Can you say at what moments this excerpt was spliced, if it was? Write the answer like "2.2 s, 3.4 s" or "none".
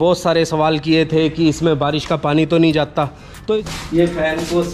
3.6 s